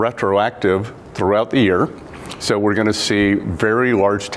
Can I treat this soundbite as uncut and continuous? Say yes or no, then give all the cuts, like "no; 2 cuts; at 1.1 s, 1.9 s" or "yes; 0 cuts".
yes; 0 cuts